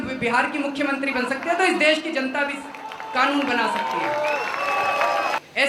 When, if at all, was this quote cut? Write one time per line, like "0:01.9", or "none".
none